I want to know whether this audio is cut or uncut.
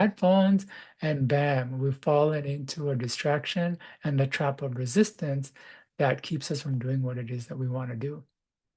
uncut